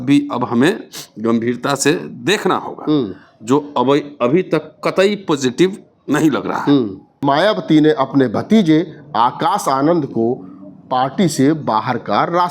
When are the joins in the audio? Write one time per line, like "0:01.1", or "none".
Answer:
0:07.2